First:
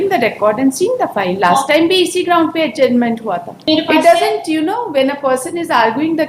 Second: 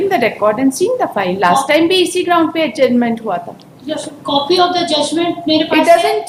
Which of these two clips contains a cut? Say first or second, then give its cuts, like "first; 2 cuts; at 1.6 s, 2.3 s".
first; 1 cut; at 3.6 s